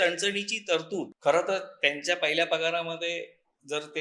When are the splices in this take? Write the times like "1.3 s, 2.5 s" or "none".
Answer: 1.1 s